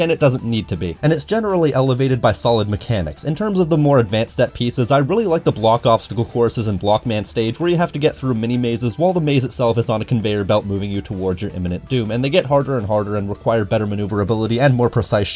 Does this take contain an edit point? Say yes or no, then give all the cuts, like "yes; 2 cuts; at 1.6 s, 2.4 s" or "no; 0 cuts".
no; 0 cuts